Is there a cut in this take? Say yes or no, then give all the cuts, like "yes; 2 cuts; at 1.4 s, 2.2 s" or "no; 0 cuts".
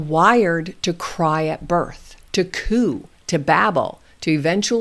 no; 0 cuts